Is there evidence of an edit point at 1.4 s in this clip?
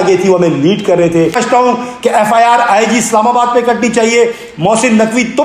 yes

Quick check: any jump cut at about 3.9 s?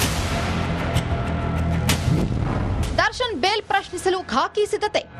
no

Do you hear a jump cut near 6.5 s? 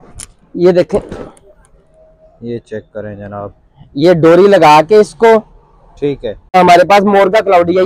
yes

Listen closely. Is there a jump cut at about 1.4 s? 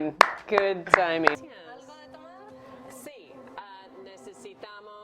yes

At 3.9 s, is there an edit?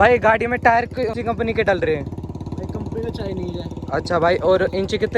no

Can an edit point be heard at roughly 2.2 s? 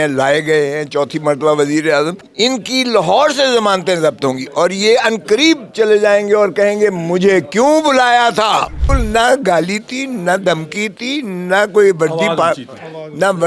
yes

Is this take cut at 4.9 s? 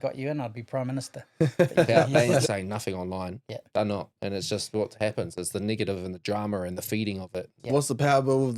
no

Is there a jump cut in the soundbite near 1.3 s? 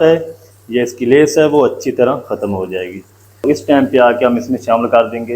no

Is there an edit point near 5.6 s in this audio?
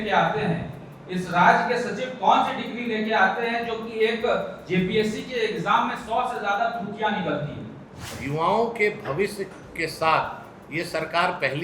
no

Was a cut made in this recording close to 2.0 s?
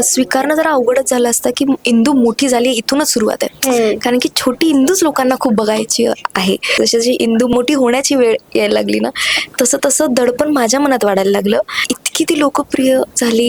no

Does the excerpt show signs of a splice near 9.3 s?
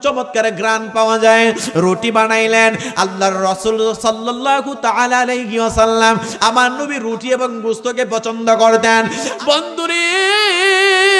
yes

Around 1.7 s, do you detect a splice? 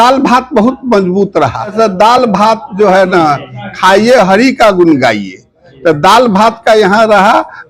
yes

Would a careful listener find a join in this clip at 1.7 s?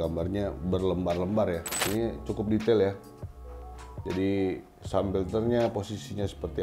yes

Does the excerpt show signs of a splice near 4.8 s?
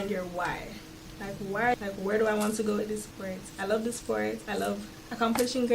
no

